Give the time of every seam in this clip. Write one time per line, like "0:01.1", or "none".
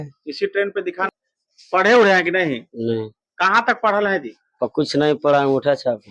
0:01.1